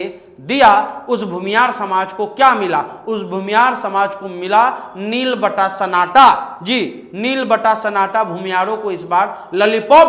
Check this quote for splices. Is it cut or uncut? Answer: uncut